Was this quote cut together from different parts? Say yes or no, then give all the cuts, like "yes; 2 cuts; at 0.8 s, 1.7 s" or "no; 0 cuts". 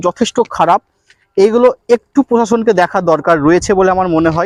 no; 0 cuts